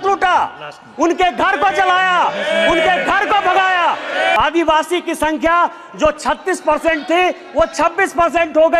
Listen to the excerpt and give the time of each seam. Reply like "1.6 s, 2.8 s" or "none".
4.4 s